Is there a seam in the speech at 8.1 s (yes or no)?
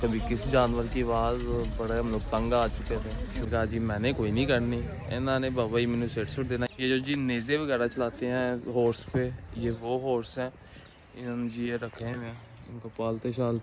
no